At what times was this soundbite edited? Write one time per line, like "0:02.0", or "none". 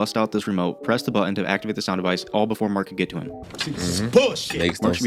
none